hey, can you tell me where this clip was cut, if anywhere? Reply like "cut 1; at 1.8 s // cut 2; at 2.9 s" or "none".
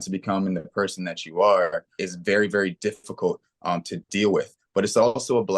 cut 1; at 2.0 s